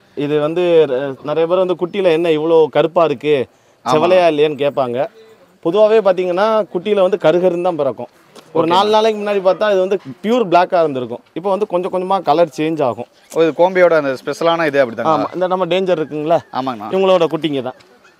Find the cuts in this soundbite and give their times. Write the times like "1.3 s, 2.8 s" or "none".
none